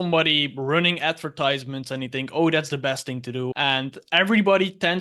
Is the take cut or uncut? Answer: cut